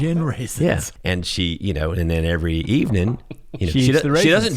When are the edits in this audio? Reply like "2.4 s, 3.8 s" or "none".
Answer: 0.9 s